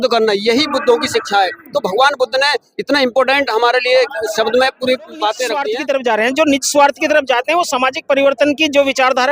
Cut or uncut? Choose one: cut